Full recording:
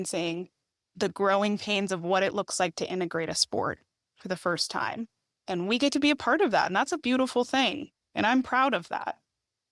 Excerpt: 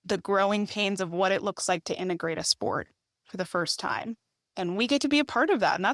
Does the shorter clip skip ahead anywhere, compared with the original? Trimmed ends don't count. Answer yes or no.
no